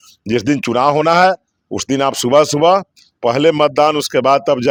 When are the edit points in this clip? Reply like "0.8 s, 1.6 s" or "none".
none